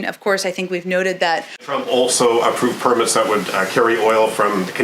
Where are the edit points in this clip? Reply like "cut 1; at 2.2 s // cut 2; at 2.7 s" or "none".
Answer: cut 1; at 1.6 s